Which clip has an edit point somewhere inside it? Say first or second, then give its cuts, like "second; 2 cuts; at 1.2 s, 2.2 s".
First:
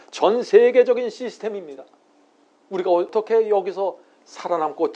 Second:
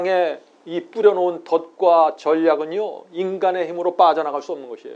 first; 1 cut; at 3.1 s